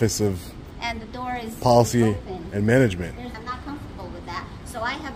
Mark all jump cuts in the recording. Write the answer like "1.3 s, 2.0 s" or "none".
3.3 s